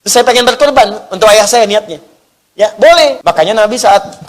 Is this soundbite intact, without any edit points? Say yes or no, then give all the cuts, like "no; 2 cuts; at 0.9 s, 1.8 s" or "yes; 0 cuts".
no; 1 cut; at 3.2 s